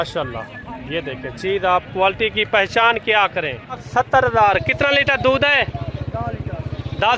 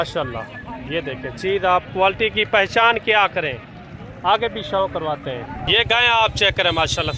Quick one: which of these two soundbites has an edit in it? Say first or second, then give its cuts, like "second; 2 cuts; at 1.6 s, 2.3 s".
first; 1 cut; at 3.8 s